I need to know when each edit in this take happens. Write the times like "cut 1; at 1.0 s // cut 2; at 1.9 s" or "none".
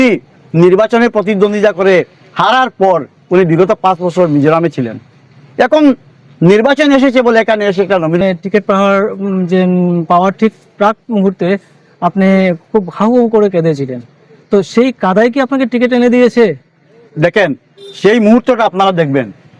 cut 1; at 8.2 s